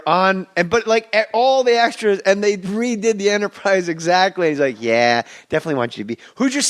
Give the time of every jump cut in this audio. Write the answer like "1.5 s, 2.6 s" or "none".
3.2 s